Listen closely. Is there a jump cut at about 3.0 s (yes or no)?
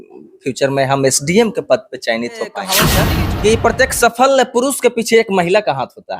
yes